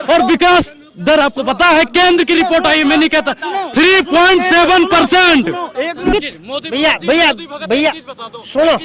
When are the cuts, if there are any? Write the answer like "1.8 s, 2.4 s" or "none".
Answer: 6.1 s